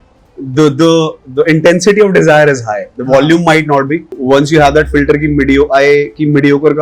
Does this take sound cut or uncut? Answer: cut